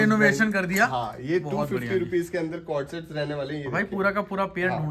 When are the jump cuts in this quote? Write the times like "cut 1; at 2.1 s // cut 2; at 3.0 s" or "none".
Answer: none